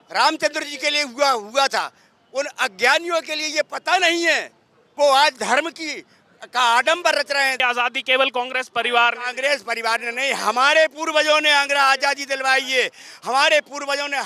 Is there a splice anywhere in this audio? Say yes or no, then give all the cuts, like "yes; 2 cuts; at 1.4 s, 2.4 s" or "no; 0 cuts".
yes; 1 cut; at 7.6 s